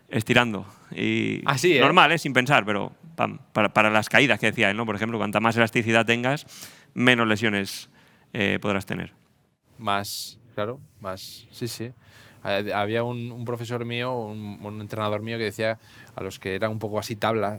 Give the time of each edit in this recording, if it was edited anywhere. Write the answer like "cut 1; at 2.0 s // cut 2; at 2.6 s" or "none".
none